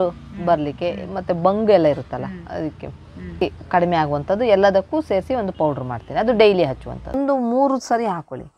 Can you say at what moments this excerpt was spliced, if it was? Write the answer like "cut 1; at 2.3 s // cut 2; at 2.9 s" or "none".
cut 1; at 3.4 s // cut 2; at 7.2 s